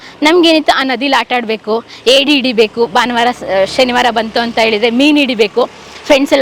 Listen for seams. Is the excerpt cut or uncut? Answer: uncut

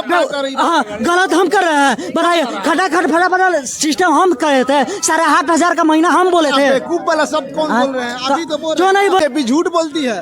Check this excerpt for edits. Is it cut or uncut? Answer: cut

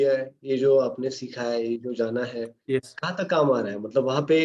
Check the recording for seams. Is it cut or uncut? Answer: uncut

